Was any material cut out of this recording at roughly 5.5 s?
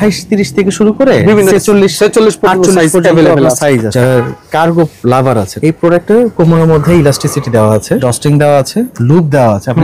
yes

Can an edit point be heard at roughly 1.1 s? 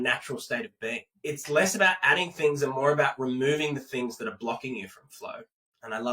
yes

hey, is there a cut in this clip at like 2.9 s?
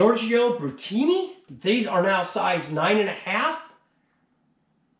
no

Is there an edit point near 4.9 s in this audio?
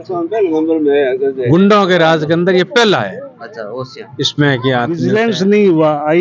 yes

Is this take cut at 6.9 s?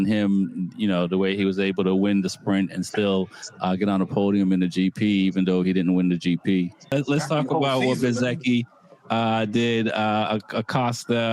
yes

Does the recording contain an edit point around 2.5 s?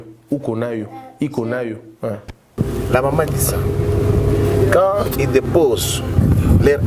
yes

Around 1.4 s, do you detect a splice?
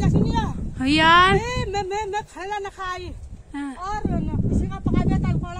no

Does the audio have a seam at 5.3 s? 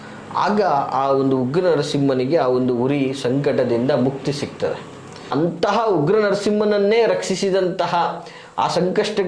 yes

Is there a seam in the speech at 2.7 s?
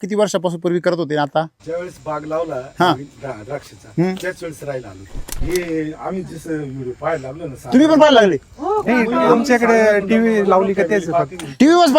no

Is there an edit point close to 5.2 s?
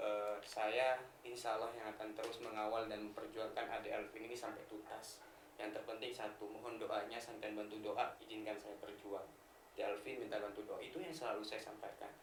no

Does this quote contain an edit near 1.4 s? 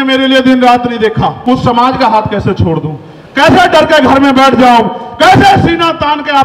yes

